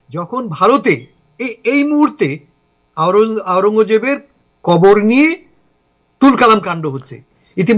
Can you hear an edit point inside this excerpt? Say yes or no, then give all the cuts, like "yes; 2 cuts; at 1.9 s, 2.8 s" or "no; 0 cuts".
no; 0 cuts